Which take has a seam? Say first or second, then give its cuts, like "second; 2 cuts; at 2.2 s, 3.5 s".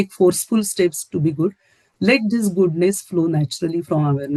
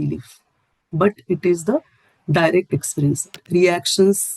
second; 1 cut; at 3.3 s